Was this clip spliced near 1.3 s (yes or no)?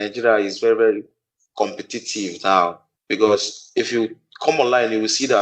no